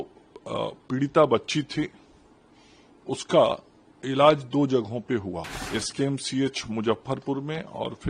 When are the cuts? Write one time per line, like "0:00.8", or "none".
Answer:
0:05.6

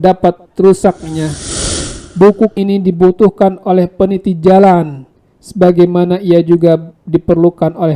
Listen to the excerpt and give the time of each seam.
0:01.4
0:02.5

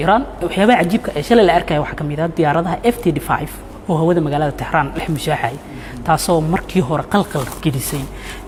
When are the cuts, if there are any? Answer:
none

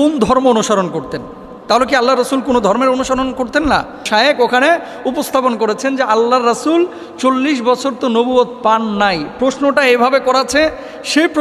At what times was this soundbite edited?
0:04.1

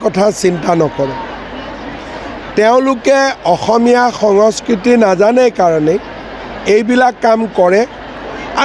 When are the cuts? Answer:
none

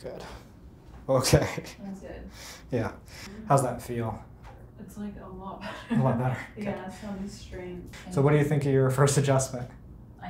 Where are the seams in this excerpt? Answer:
0:03.3
0:07.9

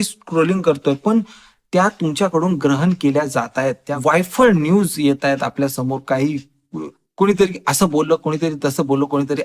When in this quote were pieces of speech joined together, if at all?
0:03.9

